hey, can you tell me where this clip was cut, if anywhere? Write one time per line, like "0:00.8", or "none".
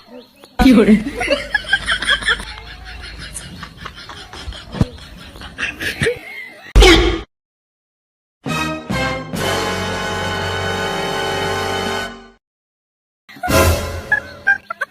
0:02.5

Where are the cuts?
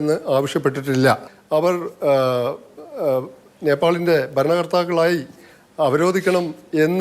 0:01.3

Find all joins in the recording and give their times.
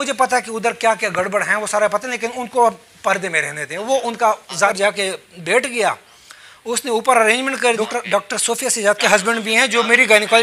0:04.7
0:07.8

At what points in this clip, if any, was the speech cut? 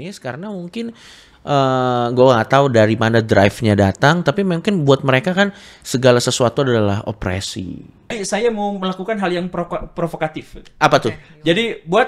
0:08.2

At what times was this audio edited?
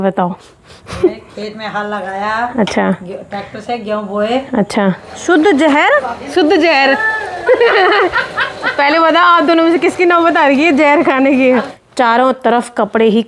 0:05.1
0:06.3
0:11.8

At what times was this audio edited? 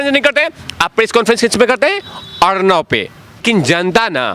0:03.4

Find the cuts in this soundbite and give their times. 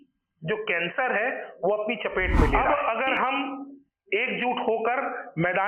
0:02.5

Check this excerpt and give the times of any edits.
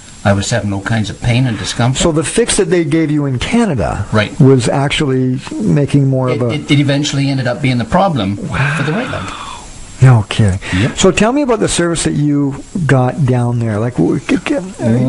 none

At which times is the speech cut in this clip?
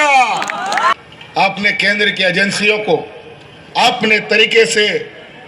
0:01.0

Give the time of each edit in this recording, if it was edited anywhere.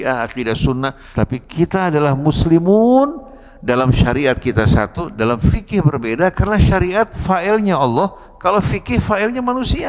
0:01.0

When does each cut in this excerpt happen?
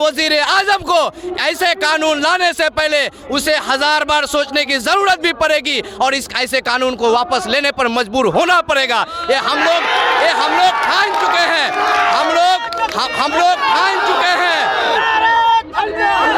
none

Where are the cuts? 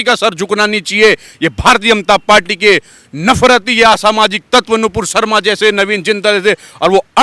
none

